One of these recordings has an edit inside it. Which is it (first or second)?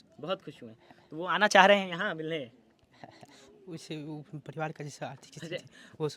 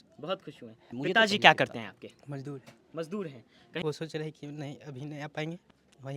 second